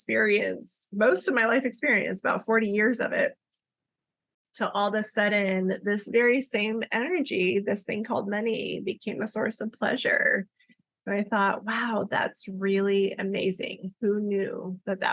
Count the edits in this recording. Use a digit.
0